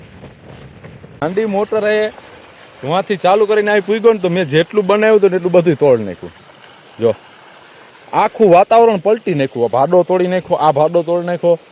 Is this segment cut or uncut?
cut